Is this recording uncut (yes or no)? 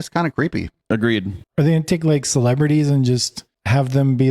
no